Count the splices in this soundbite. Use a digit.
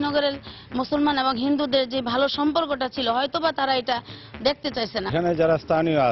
1